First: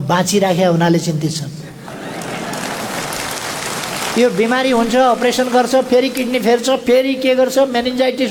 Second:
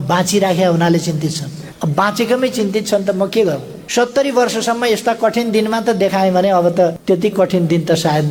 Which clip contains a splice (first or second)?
second